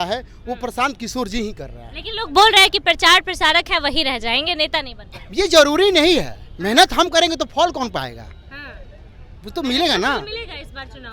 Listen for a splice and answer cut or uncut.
uncut